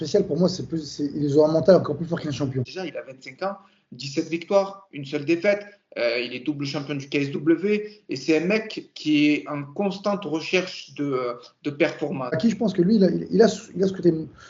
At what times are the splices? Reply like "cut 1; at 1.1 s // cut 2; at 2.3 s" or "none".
cut 1; at 2.8 s // cut 2; at 12.4 s